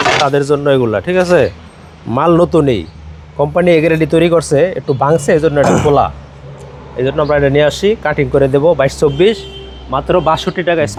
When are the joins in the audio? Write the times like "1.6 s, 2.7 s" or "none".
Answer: none